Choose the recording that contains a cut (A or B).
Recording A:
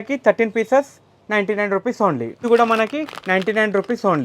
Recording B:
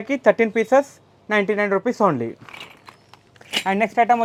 A